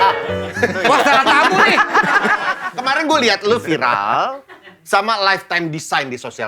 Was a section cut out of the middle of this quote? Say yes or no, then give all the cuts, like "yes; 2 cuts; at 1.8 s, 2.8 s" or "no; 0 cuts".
yes; 1 cut; at 2.7 s